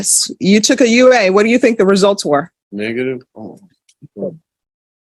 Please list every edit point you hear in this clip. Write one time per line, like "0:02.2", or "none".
0:02.6